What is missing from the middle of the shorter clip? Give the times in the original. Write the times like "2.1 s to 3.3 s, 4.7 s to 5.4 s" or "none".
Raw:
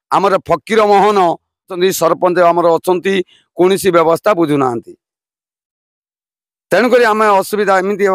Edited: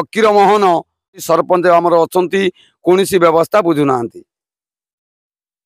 1.8 s to 1.9 s